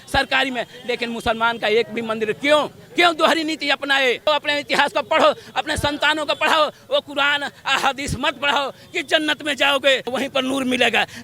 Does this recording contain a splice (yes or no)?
yes